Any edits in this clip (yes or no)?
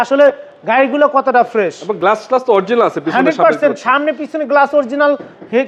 no